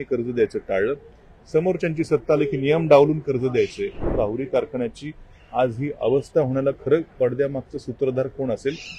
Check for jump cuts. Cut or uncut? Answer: cut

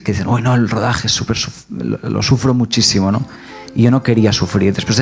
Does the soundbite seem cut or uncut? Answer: uncut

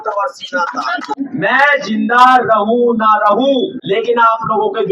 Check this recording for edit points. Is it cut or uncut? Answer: cut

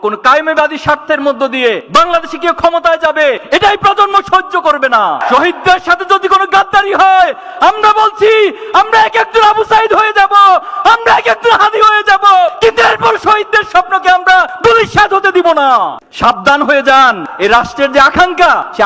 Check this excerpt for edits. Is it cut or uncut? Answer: cut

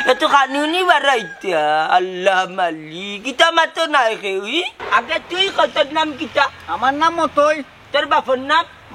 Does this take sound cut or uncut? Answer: cut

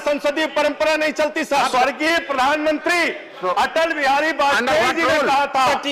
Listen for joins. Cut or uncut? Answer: cut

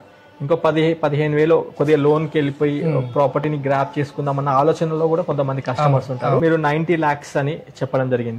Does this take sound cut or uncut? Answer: cut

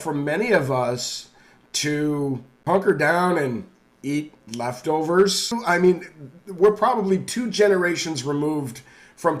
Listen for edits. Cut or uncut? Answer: cut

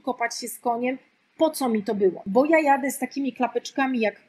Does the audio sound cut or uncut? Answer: cut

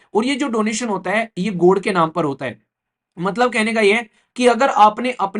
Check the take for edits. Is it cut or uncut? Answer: uncut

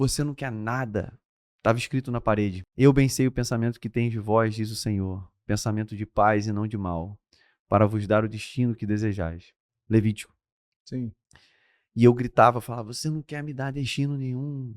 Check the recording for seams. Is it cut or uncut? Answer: cut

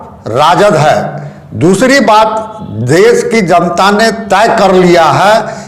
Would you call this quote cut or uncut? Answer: uncut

